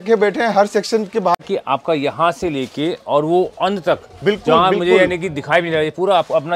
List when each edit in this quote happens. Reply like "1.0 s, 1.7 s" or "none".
1.3 s